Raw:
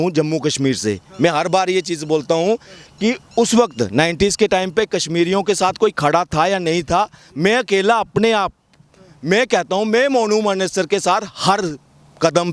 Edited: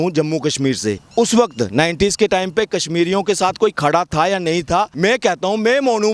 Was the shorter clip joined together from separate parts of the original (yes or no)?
yes